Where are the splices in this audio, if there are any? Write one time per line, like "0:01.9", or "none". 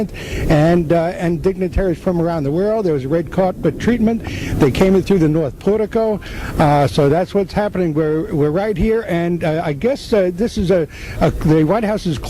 0:07.5